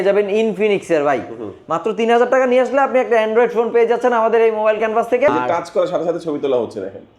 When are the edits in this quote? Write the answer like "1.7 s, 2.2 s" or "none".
5.3 s